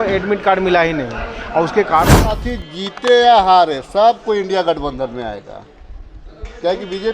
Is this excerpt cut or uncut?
cut